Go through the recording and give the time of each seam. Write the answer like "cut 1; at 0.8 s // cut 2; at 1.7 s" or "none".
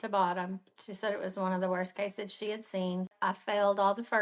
cut 1; at 3.1 s